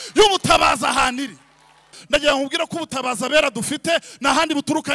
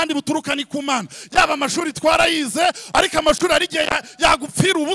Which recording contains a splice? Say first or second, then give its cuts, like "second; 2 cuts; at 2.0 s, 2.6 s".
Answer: first; 1 cut; at 2.0 s